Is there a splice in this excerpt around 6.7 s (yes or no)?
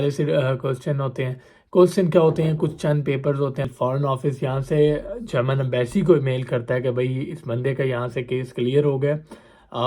no